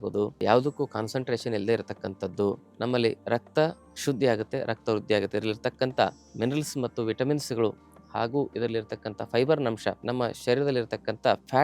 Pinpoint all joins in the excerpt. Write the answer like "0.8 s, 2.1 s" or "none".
2.7 s, 6.2 s, 10.0 s